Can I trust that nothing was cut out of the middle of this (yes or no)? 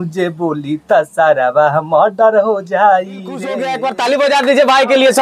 no